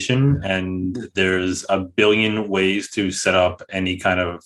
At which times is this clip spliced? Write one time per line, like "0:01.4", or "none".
none